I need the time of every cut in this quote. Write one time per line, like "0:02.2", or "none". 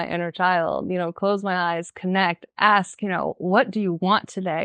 none